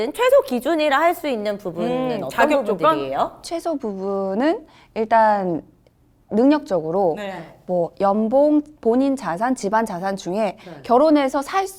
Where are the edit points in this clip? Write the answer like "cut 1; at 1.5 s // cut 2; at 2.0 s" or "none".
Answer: none